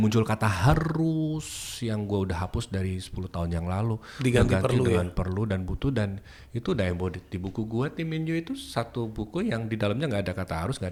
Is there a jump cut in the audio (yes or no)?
no